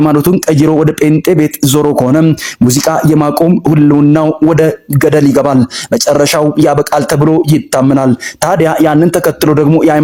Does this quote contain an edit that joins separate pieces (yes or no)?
no